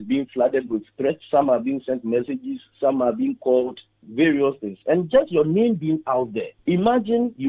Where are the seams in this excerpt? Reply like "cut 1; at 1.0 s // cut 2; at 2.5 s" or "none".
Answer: cut 1; at 1.2 s // cut 2; at 6.5 s